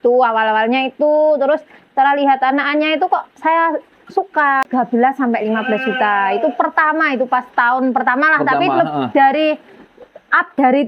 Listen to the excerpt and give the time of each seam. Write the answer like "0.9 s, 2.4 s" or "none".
4.6 s

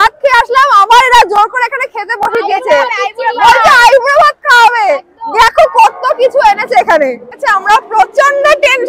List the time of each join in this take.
7.4 s

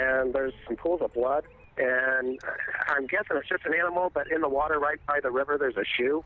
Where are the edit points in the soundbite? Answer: none

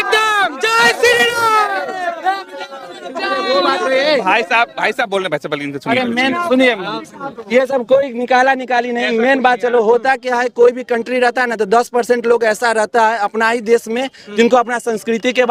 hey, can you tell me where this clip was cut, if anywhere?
none

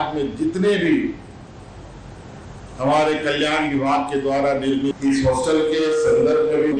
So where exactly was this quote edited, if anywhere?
5.0 s

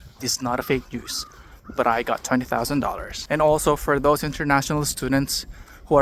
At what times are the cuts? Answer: 3.1 s

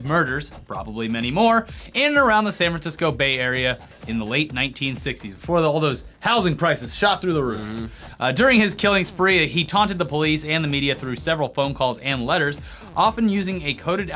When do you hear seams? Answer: none

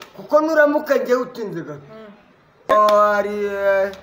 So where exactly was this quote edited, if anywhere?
2.7 s

